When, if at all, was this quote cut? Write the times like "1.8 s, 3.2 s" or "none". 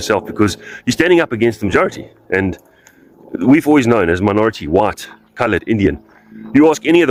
none